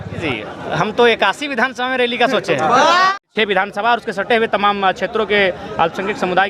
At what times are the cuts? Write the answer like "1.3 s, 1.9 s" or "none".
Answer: 3.2 s